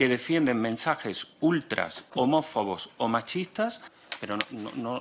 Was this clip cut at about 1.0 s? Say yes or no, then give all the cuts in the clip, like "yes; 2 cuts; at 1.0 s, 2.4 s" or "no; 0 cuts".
no; 1 cut; at 3.9 s